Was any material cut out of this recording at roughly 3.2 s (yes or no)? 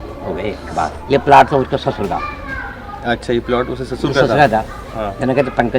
no